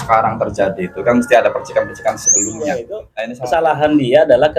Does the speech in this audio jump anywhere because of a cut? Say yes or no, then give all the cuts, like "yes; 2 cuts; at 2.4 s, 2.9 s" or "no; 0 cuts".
yes; 1 cut; at 3.0 s